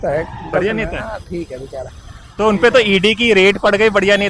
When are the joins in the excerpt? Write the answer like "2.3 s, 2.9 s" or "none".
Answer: none